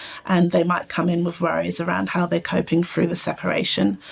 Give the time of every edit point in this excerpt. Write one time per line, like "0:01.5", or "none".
0:02.1